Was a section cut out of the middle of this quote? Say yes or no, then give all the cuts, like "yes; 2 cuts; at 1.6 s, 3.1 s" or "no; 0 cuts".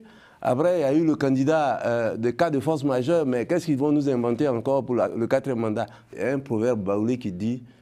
yes; 1 cut; at 6.1 s